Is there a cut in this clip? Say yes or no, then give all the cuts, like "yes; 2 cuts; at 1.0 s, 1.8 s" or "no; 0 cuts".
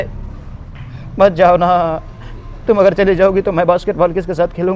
no; 0 cuts